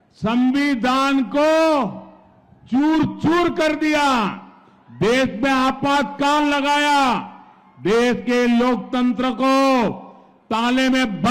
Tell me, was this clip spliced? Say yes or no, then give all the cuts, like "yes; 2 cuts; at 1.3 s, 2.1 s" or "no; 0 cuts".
no; 0 cuts